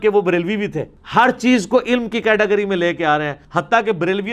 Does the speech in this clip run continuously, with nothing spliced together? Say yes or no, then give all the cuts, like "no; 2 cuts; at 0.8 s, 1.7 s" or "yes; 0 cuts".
no; 1 cut; at 3.4 s